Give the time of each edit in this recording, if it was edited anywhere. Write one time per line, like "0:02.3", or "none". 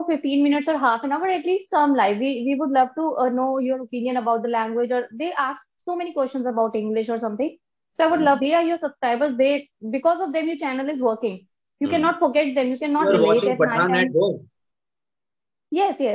0:08.4
0:13.0